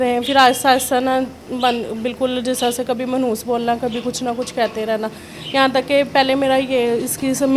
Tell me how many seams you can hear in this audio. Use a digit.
0